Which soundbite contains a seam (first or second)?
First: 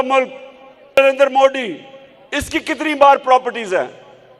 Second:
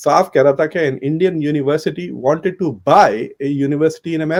first